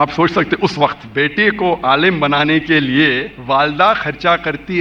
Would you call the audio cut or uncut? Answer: cut